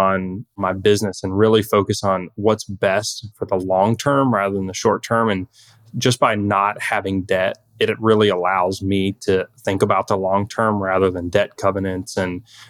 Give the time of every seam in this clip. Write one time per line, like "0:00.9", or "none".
none